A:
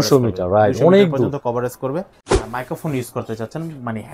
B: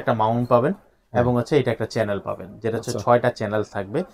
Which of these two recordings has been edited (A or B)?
A